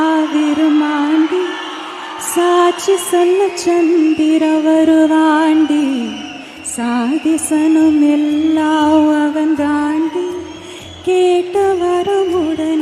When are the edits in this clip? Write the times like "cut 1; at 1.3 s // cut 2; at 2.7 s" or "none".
none